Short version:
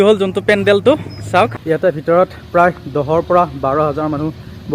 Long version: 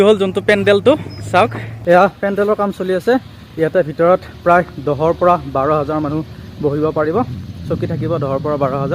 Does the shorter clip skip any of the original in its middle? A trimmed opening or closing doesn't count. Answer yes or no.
yes